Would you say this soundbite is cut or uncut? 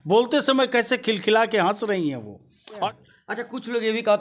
cut